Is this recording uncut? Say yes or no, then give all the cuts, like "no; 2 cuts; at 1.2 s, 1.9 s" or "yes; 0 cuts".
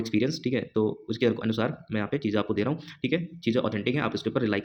yes; 0 cuts